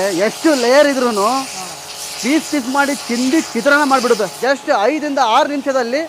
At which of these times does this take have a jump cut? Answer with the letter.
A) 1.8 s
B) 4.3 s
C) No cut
B